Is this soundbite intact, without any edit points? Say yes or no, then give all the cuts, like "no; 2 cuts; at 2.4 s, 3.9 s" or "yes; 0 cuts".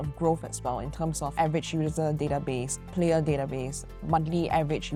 yes; 0 cuts